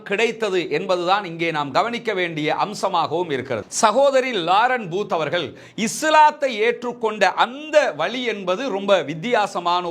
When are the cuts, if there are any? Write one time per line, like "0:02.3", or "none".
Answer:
0:03.7

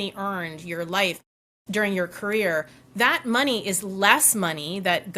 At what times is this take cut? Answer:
none

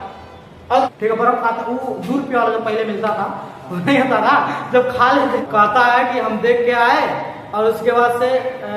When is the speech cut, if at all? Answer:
0:00.9
0:05.4

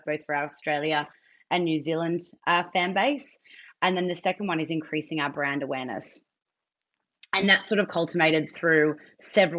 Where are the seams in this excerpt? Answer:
none

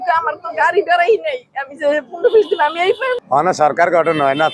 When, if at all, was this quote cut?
0:03.2

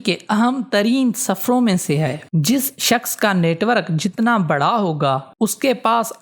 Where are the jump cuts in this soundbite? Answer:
0:02.2

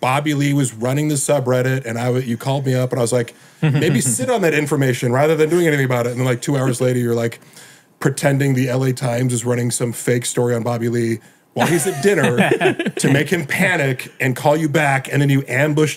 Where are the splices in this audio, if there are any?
none

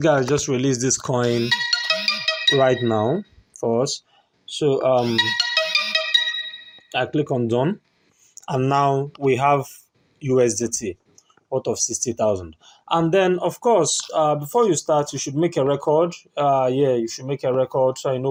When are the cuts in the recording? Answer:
none

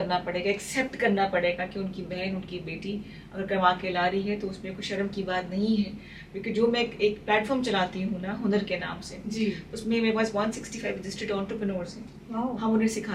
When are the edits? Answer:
none

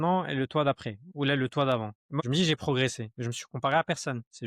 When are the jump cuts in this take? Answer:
0:02.2

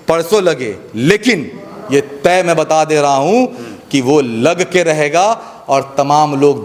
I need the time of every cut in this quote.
none

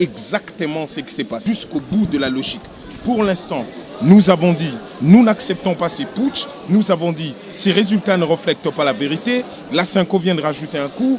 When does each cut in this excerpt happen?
0:01.5

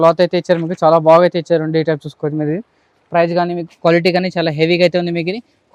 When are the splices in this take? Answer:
none

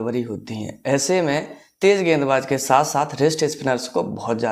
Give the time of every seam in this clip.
none

